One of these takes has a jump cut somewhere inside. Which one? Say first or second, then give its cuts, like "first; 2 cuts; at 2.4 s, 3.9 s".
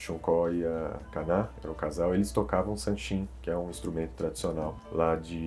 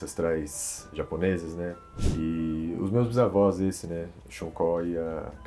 second; 1 cut; at 1.9 s